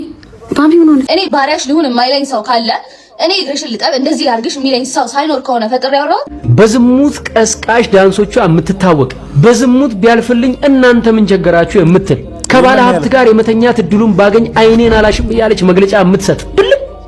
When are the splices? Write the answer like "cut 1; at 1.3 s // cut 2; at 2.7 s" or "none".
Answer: cut 1; at 1.1 s // cut 2; at 6.4 s